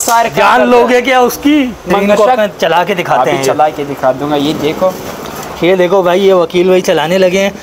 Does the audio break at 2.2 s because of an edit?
yes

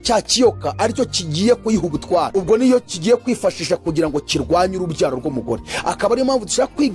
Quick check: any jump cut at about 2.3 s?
yes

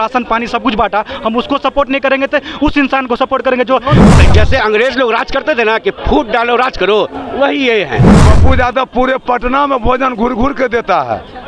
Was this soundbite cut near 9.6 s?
no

